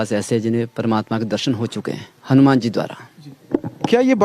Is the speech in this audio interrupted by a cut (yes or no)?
no